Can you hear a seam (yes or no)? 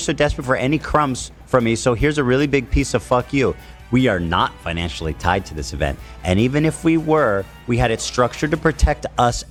no